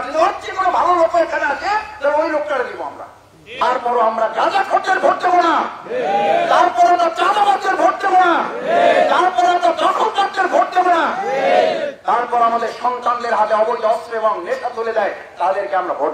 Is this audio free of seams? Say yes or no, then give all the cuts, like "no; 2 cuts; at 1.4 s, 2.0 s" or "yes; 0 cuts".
no; 1 cut; at 3.6 s